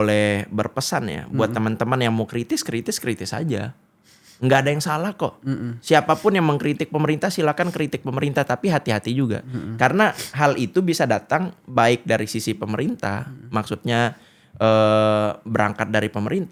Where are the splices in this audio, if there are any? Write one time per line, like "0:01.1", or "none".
none